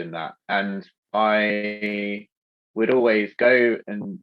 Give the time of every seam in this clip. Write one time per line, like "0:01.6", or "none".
0:00.9